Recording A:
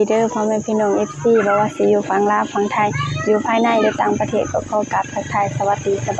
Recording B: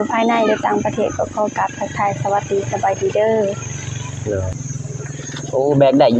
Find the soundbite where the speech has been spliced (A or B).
B